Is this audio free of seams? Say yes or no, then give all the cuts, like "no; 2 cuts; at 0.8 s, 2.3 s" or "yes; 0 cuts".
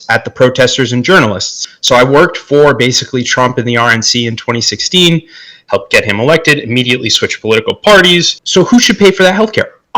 no; 2 cuts; at 1.6 s, 8.4 s